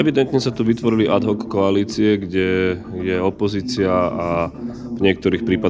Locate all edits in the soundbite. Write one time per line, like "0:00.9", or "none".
none